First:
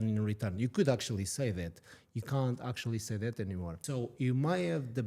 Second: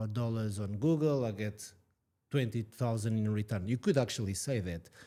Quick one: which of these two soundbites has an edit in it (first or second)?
first